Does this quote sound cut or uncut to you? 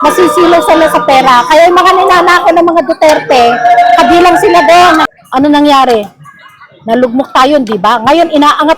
cut